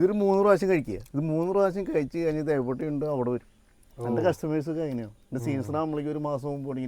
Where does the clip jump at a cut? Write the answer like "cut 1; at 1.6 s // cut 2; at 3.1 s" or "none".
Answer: cut 1; at 1.0 s